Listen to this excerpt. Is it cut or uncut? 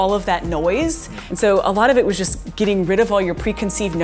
uncut